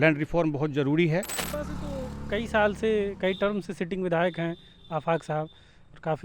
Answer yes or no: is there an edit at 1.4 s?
yes